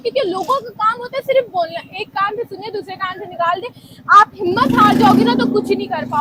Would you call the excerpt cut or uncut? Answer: uncut